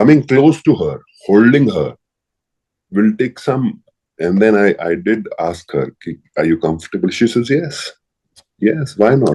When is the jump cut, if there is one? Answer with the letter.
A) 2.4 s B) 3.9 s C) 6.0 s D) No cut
D